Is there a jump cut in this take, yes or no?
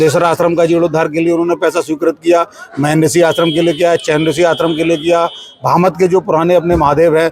no